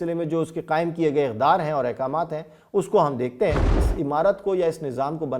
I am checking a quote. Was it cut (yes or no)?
yes